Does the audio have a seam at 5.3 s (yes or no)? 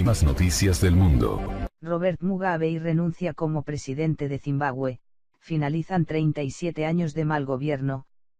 no